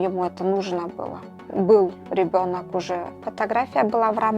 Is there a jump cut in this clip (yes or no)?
yes